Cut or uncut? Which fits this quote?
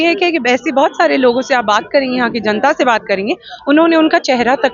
uncut